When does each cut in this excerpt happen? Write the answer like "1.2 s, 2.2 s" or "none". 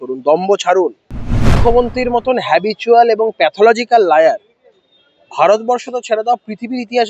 1.6 s